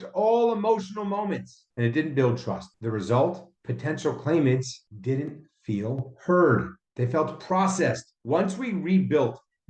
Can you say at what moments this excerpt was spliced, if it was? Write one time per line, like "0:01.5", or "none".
0:02.7
0:08.1